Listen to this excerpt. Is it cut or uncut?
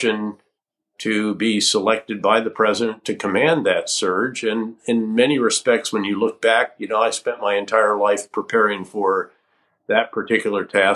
uncut